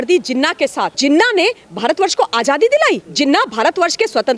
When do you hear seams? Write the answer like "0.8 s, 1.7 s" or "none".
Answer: 0.9 s, 3.1 s